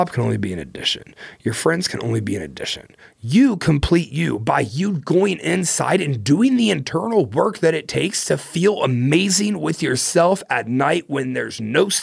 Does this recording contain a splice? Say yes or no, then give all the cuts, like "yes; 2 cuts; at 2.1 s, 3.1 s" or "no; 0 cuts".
no; 0 cuts